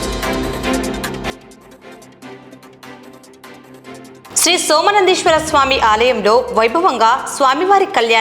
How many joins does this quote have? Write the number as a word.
three